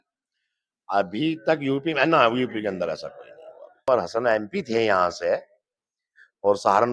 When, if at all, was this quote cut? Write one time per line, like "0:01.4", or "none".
0:03.8